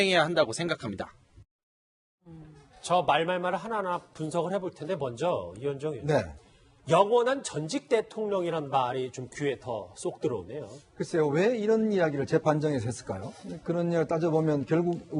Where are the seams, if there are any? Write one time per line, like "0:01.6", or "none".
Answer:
0:02.2